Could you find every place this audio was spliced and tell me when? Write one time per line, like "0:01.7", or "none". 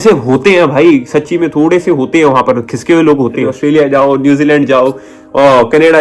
0:03.6